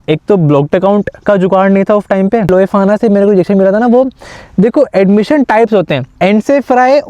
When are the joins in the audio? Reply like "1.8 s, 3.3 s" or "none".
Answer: 2.5 s, 6.0 s